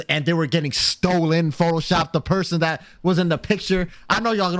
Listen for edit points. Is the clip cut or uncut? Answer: uncut